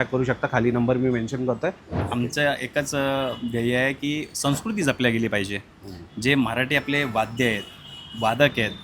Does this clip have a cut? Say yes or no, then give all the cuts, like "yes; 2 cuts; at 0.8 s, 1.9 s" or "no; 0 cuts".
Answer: yes; 1 cut; at 2.0 s